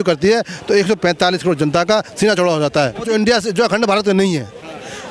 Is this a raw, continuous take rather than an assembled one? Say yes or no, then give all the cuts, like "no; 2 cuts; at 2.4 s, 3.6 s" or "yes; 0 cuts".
no; 1 cut; at 3.0 s